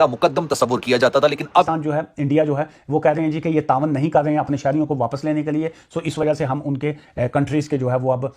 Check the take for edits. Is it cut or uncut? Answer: cut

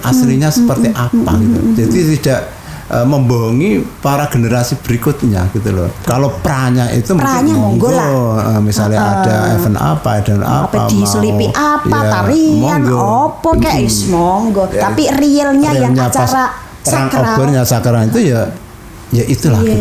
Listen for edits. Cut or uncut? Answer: cut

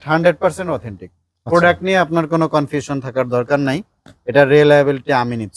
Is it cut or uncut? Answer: uncut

